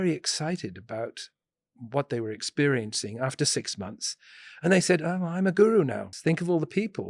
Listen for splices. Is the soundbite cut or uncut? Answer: cut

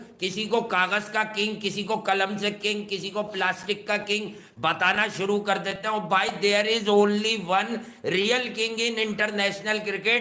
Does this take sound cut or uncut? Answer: uncut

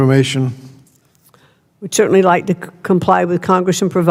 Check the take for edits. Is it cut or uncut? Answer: uncut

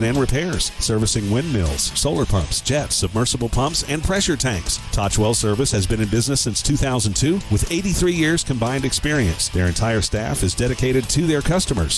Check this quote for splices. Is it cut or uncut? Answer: uncut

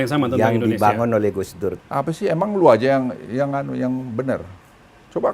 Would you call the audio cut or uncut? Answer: cut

